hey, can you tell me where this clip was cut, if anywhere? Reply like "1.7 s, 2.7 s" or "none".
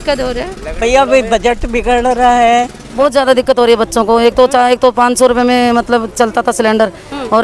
2.8 s